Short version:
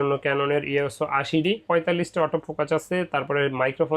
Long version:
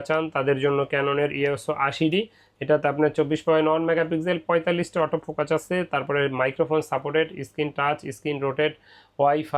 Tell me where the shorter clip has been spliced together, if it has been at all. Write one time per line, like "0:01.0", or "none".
0:01.6

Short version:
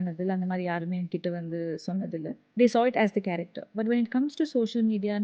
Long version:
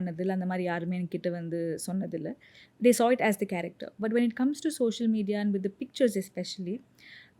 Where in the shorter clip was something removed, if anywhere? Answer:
0:02.4

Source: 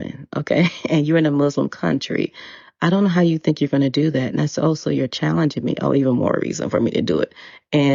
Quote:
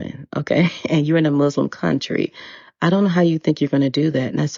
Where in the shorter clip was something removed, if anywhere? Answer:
none

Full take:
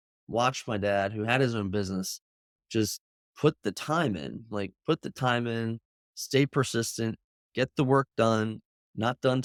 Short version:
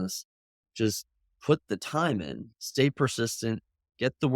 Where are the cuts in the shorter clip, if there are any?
0:02.4

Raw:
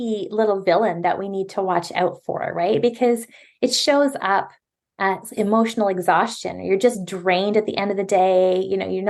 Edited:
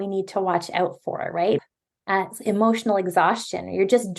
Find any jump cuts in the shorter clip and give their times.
0:01.6

